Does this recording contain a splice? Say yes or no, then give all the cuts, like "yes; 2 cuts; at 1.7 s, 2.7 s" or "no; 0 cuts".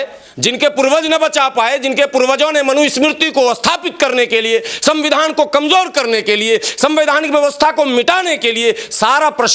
no; 0 cuts